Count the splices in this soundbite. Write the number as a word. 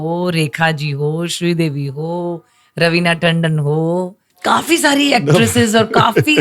one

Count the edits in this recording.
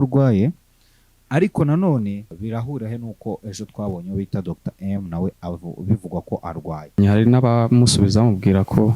two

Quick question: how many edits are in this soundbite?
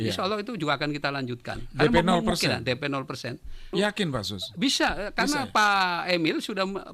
one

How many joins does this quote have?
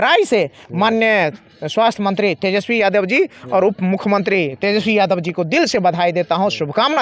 zero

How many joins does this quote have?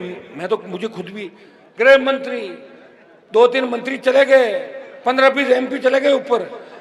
zero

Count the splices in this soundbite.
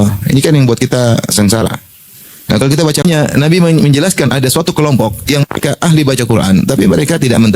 one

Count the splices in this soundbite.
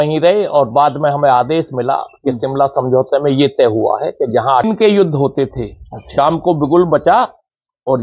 one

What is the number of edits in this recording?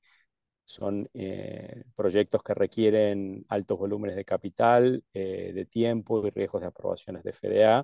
zero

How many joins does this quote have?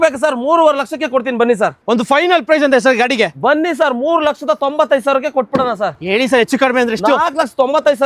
two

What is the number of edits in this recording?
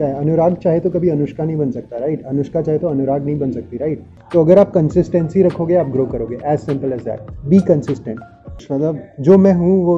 two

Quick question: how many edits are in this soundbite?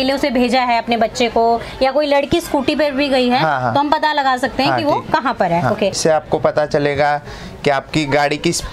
one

